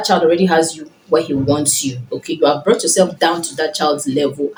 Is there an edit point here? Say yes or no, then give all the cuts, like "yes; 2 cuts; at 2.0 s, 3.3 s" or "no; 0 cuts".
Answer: no; 0 cuts